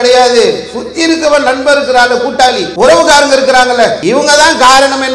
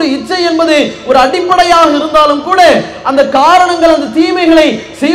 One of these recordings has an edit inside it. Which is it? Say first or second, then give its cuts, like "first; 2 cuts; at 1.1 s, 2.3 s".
first; 2 cuts; at 2.7 s, 4.0 s